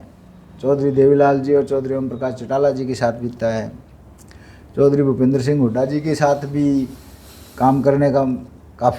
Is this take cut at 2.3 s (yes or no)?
no